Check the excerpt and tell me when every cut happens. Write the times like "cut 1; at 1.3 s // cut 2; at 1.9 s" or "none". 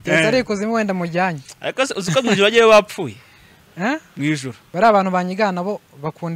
cut 1; at 4.6 s